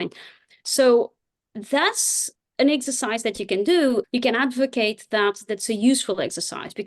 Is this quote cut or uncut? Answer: cut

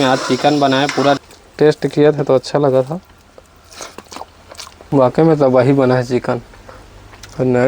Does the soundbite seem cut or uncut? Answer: cut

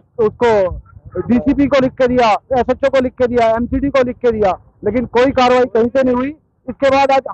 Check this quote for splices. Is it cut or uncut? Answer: uncut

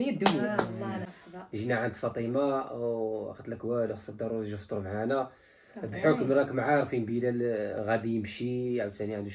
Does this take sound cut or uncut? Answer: cut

